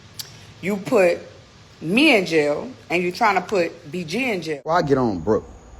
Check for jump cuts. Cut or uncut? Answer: cut